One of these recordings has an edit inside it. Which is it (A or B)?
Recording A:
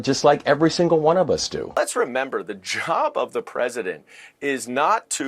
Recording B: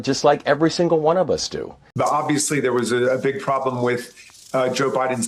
A